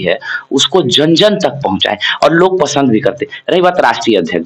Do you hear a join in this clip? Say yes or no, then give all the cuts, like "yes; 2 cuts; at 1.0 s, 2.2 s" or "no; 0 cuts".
no; 0 cuts